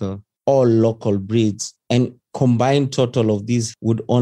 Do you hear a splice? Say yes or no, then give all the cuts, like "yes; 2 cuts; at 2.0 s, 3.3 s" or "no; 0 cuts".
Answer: no; 0 cuts